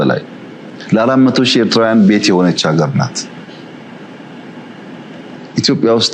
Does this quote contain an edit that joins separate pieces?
no; 0 cuts

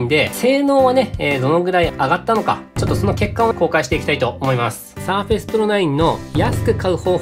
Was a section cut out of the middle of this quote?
yes; 2 cuts; at 2.8 s, 5.0 s

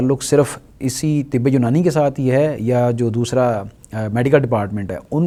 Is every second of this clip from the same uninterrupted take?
yes; 0 cuts

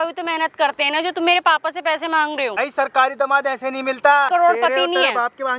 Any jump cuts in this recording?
yes; 2 cuts; at 2.6 s, 4.3 s

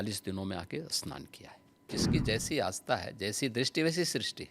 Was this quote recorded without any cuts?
no; 1 cut; at 1.8 s

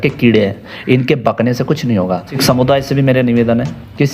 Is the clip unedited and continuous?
no; 1 cut; at 2.3 s

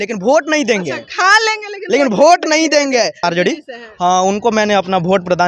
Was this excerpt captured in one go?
no; 1 cut; at 3.2 s

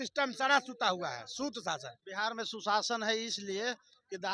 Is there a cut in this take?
yes; 1 cut; at 2.0 s

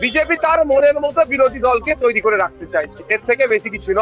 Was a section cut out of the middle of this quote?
no; 0 cuts

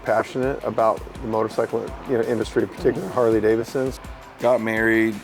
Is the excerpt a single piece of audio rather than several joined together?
no; 1 cut; at 3.9 s

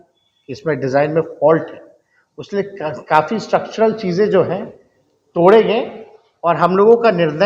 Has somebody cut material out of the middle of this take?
no; 0 cuts

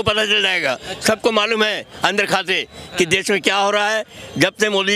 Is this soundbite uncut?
yes; 0 cuts

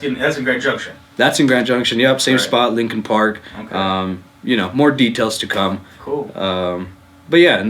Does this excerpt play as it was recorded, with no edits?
yes; 0 cuts

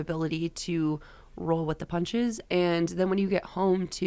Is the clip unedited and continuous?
no; 1 cut; at 2.4 s

